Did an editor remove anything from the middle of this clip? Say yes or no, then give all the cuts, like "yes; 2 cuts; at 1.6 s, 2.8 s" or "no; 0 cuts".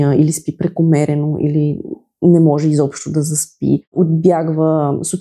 yes; 1 cut; at 4.0 s